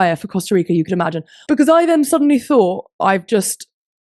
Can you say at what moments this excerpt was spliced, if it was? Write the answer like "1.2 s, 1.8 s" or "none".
1.3 s